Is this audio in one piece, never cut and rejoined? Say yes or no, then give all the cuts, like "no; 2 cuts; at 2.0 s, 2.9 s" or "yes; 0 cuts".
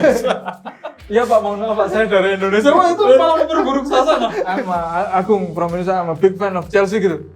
no; 1 cut; at 4.4 s